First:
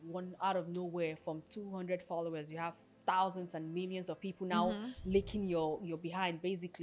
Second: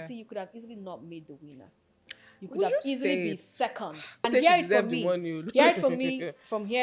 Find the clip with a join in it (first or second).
second